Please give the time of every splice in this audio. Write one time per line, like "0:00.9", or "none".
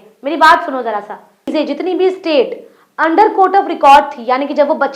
0:01.5